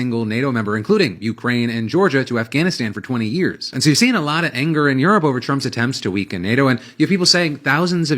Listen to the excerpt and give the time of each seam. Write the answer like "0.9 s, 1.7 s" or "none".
7.0 s

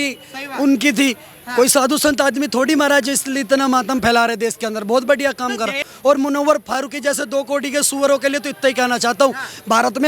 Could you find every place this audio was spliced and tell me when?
5.9 s

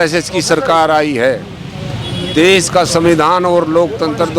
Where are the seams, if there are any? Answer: none

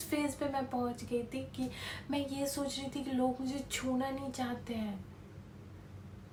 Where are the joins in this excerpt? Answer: none

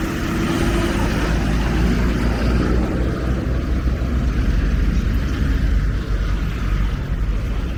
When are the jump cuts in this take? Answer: none

